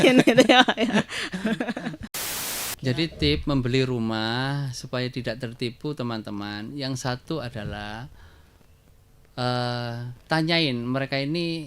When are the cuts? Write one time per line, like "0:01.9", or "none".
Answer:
0:02.1